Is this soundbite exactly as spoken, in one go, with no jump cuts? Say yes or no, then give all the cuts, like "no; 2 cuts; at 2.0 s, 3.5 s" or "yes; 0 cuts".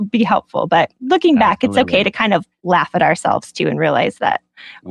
yes; 0 cuts